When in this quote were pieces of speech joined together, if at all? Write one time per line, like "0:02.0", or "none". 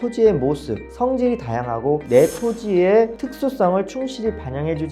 0:02.0